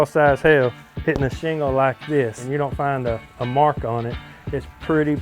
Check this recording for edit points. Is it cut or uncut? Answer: cut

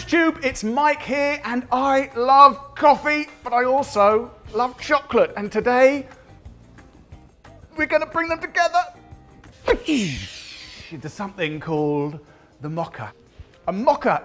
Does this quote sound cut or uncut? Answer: uncut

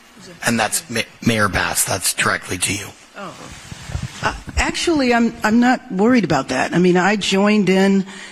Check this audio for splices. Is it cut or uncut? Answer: uncut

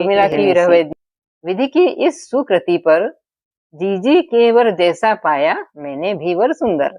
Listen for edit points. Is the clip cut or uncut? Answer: cut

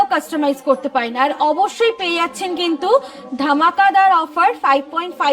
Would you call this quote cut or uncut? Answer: uncut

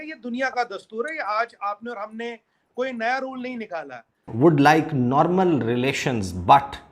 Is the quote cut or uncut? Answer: cut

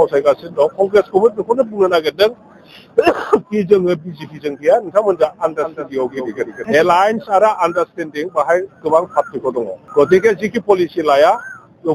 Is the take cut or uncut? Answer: cut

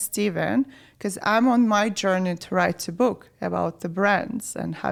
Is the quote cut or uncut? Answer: uncut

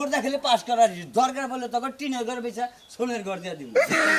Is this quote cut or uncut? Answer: uncut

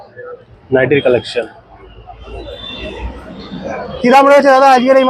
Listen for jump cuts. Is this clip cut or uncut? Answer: cut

